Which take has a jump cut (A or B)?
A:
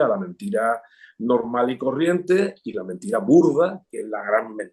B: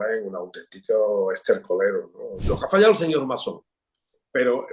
B